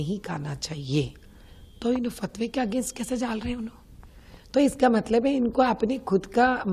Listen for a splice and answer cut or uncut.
uncut